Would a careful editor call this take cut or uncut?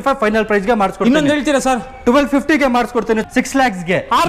cut